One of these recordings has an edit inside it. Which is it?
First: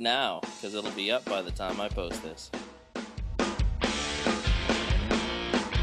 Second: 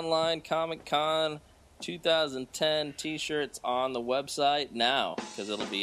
first; 1 cut; at 2.1 s

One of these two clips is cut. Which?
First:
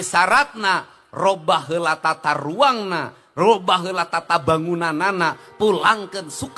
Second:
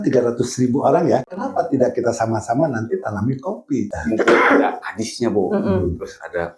second; 2 cuts; at 1.4 s, 3.9 s

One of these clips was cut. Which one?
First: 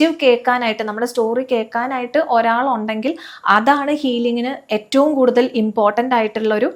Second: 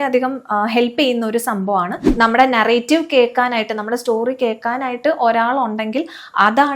second; 1 cut; at 2.0 s

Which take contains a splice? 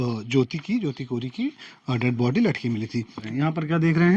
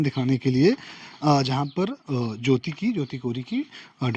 first; 1 cut; at 3.2 s

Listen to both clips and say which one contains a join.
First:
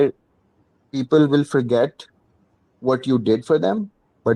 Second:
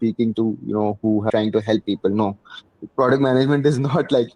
second; 1 cut; at 1.3 s

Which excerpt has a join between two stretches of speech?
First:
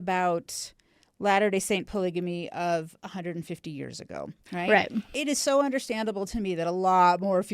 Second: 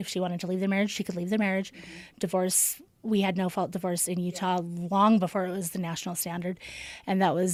first; 1 cut; at 5.1 s

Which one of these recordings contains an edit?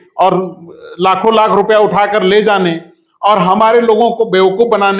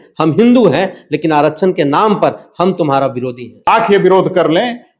second; 1 cut; at 3.7 s

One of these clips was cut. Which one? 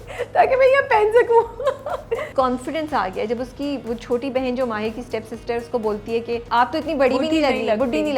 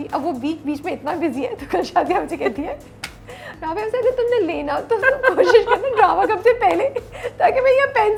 first; 3 cuts; at 2.3 s, 3.8 s, 6.4 s

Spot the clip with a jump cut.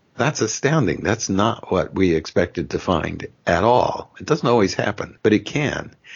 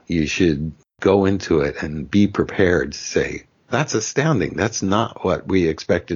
first; 1 cut; at 5.1 s

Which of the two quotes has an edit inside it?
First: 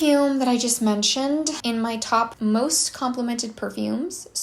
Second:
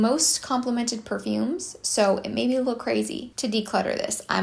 first; 1 cut; at 1.6 s

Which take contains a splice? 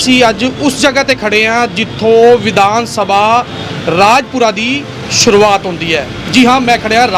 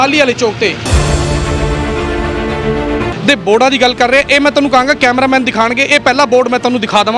second; 2 cuts; at 1.0 s, 3.1 s

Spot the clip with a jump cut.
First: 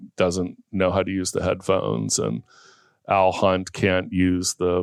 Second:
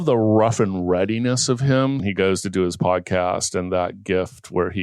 second; 1 cut; at 2.0 s

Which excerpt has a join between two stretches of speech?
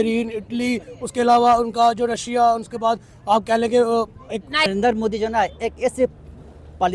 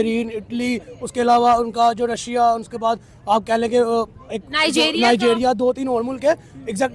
first; 1 cut; at 4.7 s

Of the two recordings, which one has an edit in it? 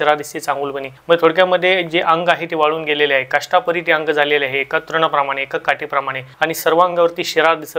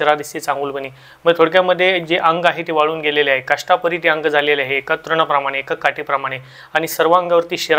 first; 2 cuts; at 0.9 s, 6.2 s

